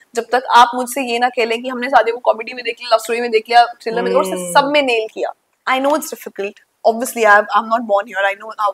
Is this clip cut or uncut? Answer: cut